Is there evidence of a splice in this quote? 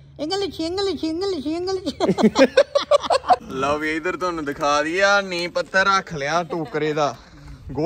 yes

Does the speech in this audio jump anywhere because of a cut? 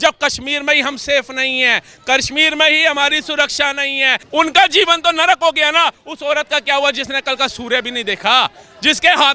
yes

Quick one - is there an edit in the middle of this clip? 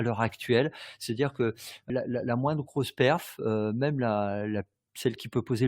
yes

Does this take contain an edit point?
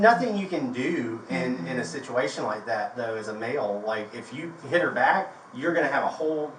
no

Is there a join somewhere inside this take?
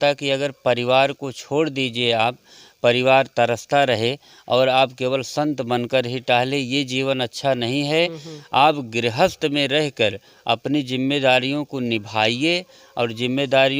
no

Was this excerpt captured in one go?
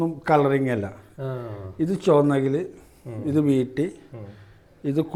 yes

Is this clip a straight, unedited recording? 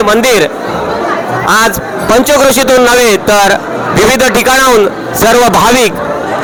yes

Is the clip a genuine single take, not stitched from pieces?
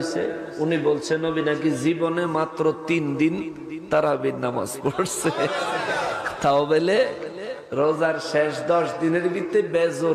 yes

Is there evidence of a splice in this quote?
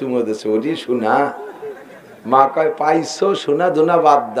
no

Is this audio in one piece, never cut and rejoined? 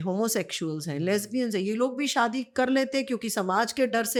yes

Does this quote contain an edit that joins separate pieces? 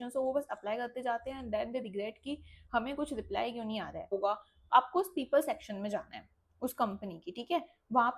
yes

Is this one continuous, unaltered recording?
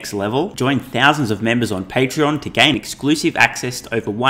yes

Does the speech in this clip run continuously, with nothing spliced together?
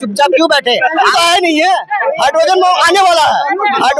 no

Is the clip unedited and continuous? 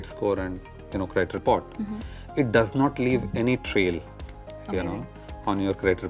yes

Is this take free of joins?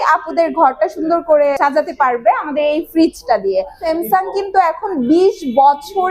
no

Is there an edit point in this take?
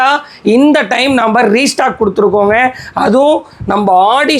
no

